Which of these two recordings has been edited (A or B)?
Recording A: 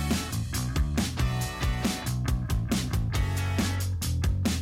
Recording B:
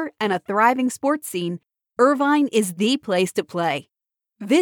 A